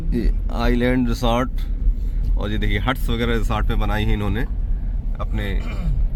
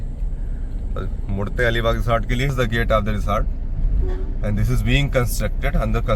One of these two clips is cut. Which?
second; 1 cut; at 2.5 s

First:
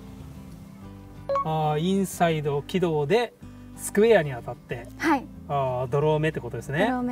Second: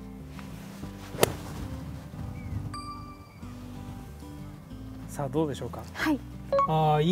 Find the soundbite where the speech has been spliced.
first; 1 cut; at 1.1 s

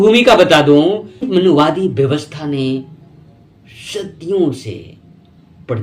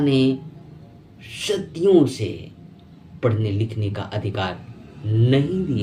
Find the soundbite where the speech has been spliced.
first; 1 cut; at 1.3 s

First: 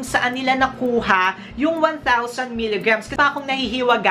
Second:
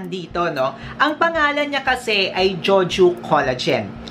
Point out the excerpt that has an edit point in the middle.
first; 1 cut; at 3.1 s

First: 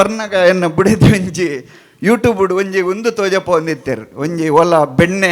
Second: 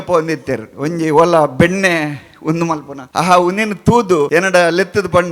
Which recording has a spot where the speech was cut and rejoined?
second; 2 cuts; at 3.0 s, 4.3 s

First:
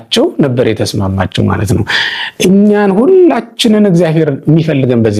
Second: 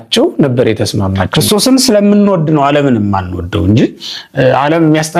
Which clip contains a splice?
second; 1 cut; at 1.2 s

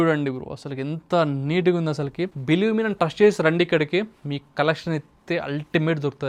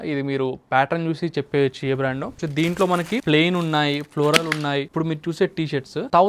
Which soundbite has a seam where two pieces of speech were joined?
second; 3 cuts; at 2.4 s, 3.2 s, 4.9 s

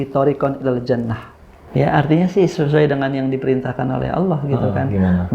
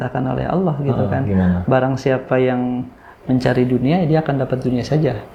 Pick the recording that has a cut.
first; 1 cut; at 1.6 s

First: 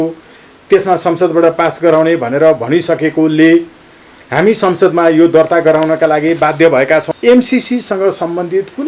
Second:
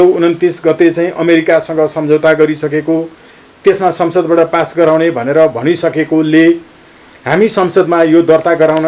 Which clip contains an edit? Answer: first; 1 cut; at 7.1 s

